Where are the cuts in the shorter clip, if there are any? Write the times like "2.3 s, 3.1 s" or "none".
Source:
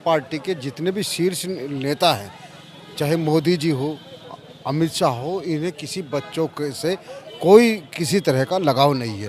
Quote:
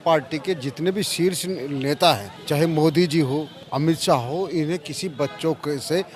2.3 s, 3.6 s